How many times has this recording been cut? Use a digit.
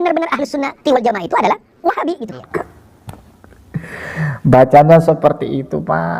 1